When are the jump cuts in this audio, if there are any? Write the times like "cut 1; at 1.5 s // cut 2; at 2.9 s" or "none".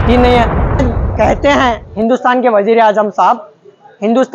cut 1; at 1.0 s